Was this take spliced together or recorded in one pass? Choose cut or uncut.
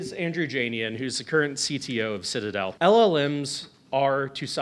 cut